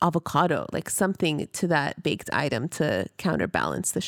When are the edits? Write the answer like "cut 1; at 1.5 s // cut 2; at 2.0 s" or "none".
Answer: none